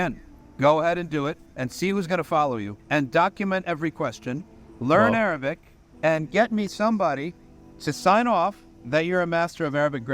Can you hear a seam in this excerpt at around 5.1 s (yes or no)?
yes